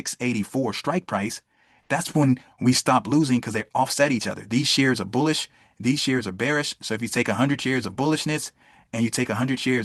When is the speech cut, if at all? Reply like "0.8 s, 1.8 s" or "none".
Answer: none